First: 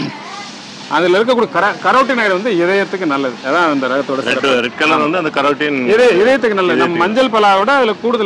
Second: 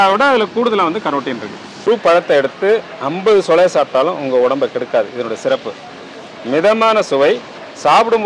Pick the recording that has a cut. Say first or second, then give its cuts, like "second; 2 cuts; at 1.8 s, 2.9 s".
second; 1 cut; at 1.9 s